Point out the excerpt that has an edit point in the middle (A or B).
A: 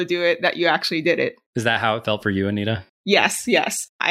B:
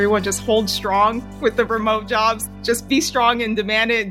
B